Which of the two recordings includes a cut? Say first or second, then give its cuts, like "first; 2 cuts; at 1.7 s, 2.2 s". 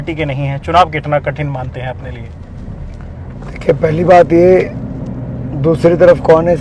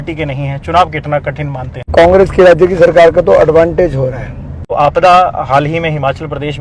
second; 2 cuts; at 1.9 s, 4.6 s